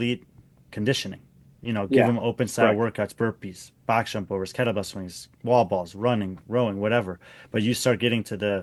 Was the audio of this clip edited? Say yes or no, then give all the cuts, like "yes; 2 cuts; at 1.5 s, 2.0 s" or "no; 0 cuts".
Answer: no; 0 cuts